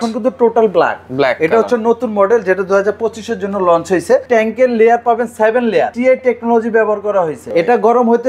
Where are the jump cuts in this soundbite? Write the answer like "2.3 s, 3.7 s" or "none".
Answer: 4.2 s, 5.9 s, 7.4 s